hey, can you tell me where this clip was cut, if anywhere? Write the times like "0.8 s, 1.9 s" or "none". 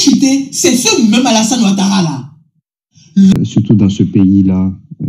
3.3 s